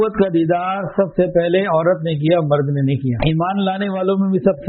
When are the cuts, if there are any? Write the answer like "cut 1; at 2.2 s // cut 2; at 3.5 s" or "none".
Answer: cut 1; at 3.2 s